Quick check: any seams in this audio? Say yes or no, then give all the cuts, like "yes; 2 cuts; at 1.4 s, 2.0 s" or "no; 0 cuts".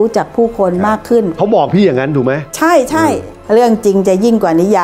yes; 2 cuts; at 1.4 s, 3.3 s